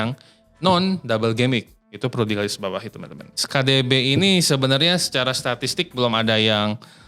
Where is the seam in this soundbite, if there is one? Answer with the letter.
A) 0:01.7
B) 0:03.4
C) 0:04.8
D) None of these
B